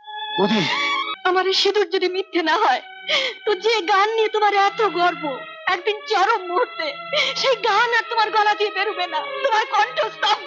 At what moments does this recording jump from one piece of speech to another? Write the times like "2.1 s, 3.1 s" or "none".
1.0 s